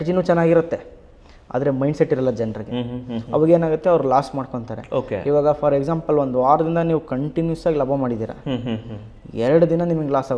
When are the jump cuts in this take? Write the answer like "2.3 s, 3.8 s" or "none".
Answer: none